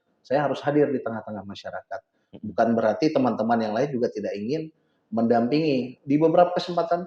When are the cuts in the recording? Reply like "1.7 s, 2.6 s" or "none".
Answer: none